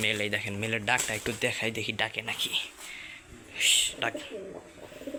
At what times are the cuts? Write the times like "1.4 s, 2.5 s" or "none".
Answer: none